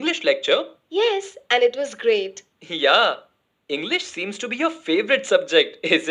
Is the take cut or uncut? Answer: uncut